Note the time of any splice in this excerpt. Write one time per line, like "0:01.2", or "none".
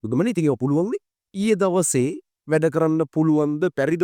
0:01.4